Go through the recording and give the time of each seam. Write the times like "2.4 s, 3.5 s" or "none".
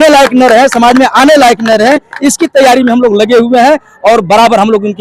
none